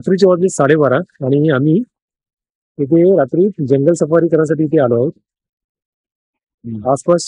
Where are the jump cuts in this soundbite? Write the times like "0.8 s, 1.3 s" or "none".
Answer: none

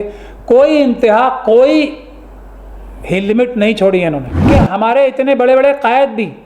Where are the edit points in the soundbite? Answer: 4.3 s

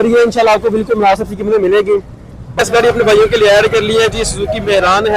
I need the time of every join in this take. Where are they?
2.4 s

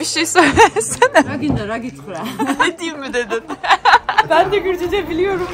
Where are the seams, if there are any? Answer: 1.3 s, 2.6 s, 4.3 s

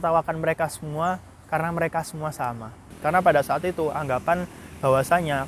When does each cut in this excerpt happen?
2.9 s

